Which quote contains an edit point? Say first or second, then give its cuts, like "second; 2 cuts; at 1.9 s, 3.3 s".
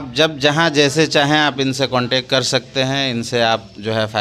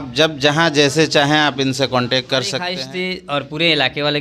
second; 1 cut; at 2.7 s